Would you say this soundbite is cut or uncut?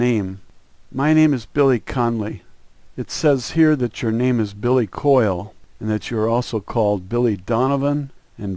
cut